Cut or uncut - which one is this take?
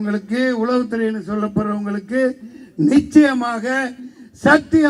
uncut